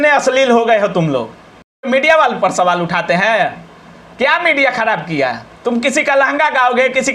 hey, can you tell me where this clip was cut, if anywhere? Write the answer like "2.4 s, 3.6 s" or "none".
1.9 s